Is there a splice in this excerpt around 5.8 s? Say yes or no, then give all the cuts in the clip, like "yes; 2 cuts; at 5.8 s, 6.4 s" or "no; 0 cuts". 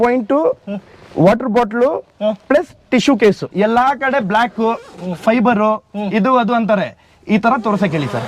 no; 1 cut; at 3.5 s